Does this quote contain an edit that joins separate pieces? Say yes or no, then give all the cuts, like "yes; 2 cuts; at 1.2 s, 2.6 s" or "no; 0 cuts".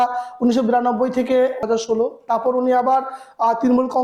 no; 0 cuts